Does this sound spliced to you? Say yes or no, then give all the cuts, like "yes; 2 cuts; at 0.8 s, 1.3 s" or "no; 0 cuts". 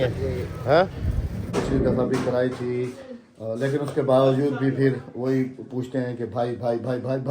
yes; 1 cut; at 1.4 s